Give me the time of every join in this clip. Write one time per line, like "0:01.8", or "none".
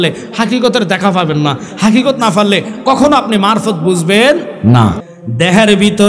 0:05.1